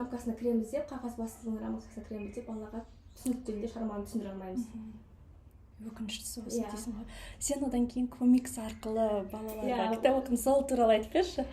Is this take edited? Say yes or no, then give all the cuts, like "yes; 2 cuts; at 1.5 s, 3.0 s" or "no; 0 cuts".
no; 0 cuts